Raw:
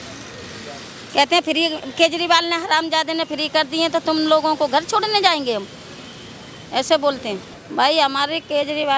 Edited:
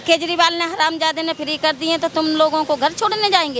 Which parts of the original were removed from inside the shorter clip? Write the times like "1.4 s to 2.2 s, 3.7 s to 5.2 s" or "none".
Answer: none

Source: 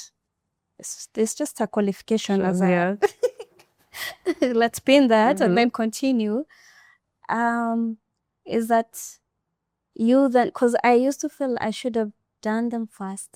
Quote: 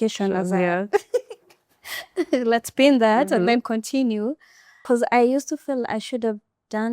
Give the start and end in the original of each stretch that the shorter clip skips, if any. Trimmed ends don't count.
6.9 s to 10.5 s

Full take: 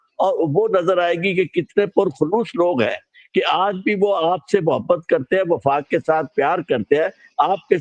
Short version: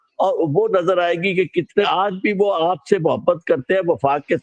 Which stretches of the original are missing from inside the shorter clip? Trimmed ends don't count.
1.9 s to 3.5 s

